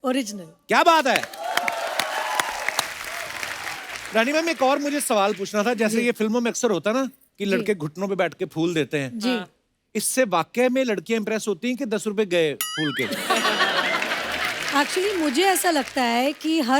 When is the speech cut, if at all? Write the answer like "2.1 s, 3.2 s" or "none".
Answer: 3.7 s